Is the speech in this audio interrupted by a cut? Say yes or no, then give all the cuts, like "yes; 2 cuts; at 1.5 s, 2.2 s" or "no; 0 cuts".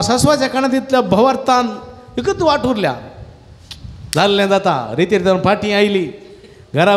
no; 0 cuts